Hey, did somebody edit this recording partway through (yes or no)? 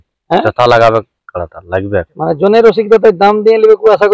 no